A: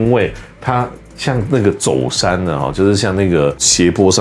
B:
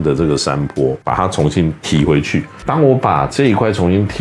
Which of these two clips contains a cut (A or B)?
B